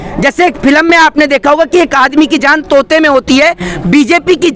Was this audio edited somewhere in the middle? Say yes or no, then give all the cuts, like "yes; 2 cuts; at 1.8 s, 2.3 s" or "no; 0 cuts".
no; 0 cuts